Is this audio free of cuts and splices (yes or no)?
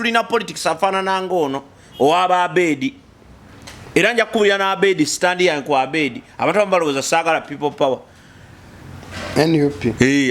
yes